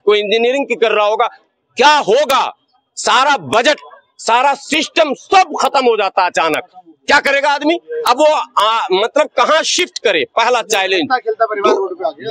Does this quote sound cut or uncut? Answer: uncut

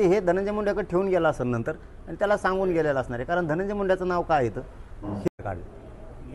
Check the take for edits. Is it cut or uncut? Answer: cut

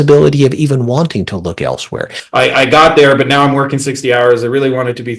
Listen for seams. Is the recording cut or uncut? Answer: cut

